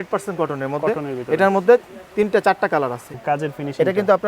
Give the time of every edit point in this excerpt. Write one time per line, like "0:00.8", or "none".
0:03.1